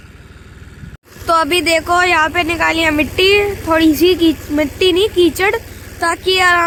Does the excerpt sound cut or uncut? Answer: uncut